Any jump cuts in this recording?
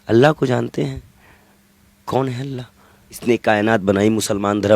yes; 1 cut; at 3.2 s

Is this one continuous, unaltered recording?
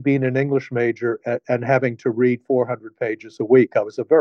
yes; 0 cuts

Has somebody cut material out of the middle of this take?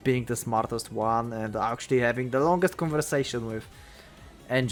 no; 0 cuts

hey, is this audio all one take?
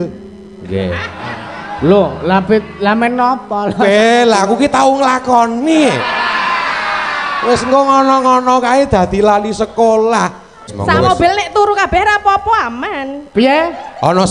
no; 1 cut; at 10.6 s

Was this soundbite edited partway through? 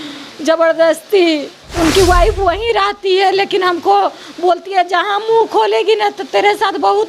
yes; 1 cut; at 1.6 s

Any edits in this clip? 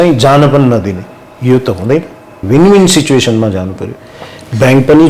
yes; 1 cut; at 2.4 s

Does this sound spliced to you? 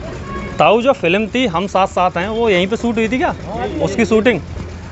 no; 0 cuts

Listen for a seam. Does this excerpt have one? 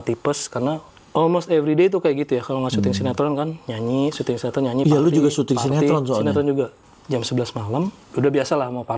yes; 3 cuts; at 0.9 s, 6.8 s, 8.0 s

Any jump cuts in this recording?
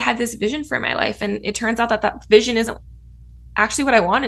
no; 0 cuts

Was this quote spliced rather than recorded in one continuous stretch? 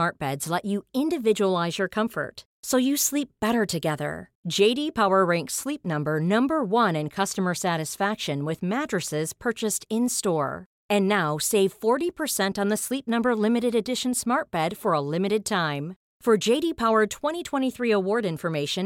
no; 0 cuts

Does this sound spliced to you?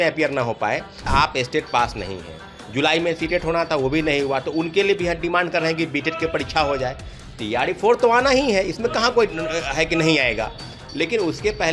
yes; 1 cut; at 1.1 s

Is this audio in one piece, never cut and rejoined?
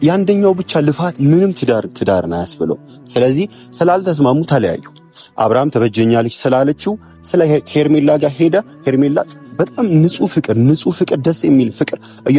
yes; 0 cuts

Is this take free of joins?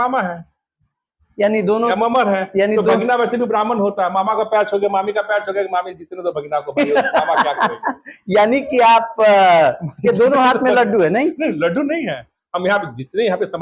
yes; 0 cuts

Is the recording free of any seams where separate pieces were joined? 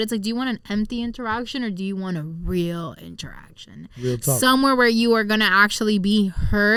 yes; 0 cuts

